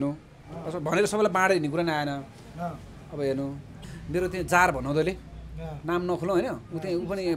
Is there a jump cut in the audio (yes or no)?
yes